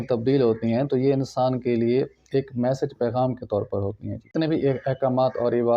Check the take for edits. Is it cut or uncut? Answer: cut